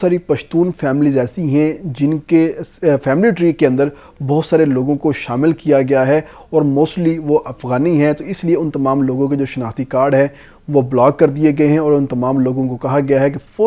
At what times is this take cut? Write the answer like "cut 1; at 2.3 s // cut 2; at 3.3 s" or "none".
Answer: none